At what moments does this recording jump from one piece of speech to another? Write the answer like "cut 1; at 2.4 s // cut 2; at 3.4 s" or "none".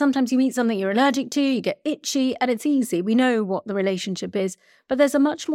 none